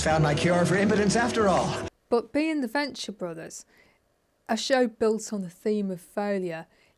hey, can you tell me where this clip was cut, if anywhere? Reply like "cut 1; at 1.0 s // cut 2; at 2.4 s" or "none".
none